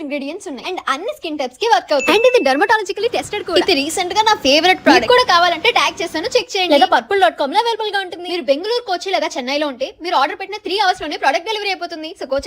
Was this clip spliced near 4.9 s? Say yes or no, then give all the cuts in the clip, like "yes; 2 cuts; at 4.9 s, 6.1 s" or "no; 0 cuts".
yes; 3 cuts; at 2.0 s, 3.5 s, 4.9 s